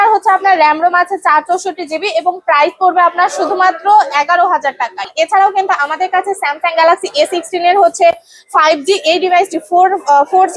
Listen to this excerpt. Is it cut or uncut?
cut